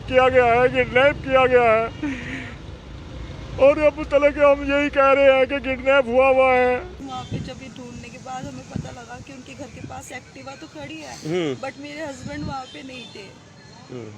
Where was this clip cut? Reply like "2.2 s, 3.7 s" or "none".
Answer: 7.0 s